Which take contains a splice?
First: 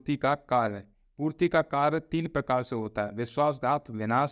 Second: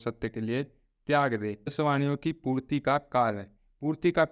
second; 1 cut; at 1.7 s

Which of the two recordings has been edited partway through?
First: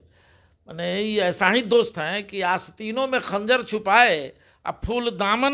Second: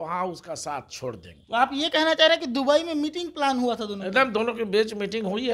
second; 1 cut; at 1.3 s

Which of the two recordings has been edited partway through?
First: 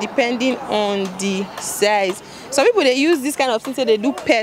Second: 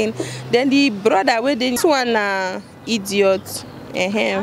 second; 1 cut; at 1.8 s

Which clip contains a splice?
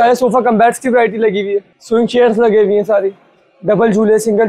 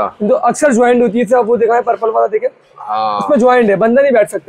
first; 1 cut; at 1.7 s

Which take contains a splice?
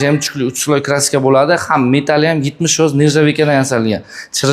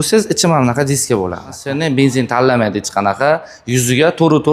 second; 1 cut; at 1.6 s

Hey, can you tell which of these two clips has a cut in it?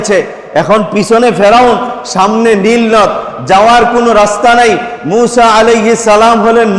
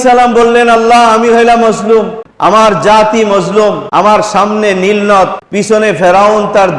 second; 3 cuts; at 2.2 s, 3.8 s, 5.4 s

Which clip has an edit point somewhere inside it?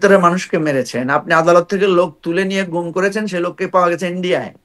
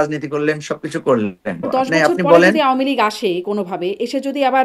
second; 1 cut; at 1.7 s

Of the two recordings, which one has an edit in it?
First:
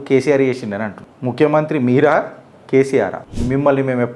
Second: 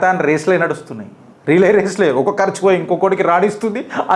first; 1 cut; at 3.2 s

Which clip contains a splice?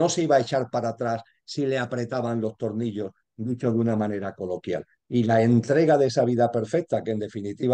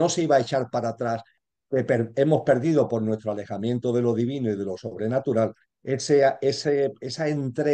second; 1 cut; at 1.4 s

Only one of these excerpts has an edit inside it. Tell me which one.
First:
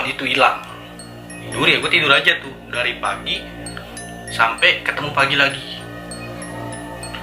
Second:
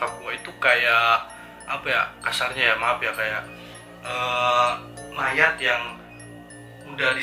first; 1 cut; at 1.4 s

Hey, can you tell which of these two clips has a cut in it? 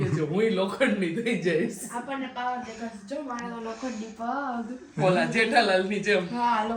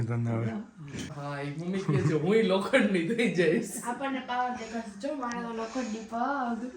second; 1 cut; at 1.0 s

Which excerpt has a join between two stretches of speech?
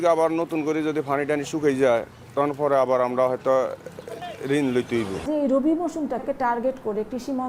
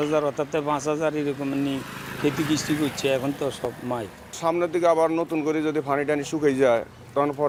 first; 2 cuts; at 5.2 s, 6.2 s

